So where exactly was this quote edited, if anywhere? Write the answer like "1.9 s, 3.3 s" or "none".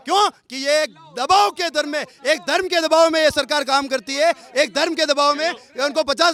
none